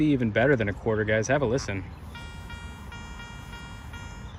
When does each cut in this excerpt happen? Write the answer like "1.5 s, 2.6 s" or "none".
none